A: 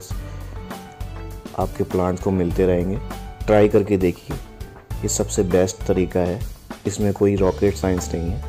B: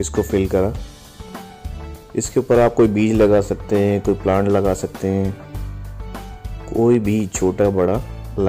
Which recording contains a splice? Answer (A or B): B